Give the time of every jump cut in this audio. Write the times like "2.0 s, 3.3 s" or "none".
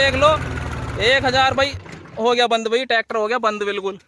none